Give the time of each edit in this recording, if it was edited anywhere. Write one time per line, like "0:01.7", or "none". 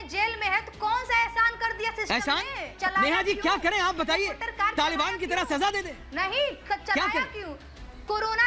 none